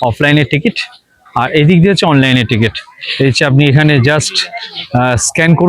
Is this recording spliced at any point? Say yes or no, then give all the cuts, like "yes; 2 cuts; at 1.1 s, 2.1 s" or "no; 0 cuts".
no; 0 cuts